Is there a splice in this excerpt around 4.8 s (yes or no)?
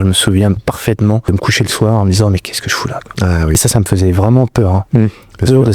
no